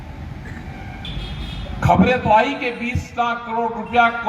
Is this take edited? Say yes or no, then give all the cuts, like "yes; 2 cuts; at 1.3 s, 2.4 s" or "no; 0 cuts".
yes; 1 cut; at 1.0 s